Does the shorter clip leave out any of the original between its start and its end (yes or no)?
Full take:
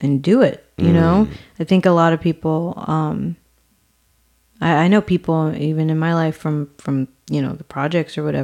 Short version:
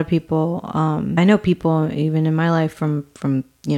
yes